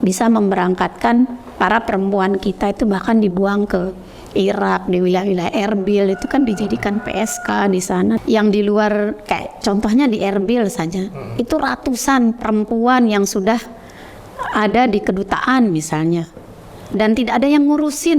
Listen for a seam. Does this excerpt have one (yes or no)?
yes